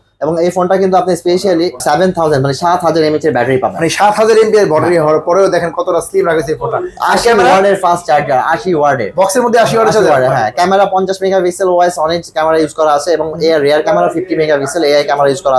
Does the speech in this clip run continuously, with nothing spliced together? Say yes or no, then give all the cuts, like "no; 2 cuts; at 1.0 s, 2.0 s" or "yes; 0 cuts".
no; 1 cut; at 1.8 s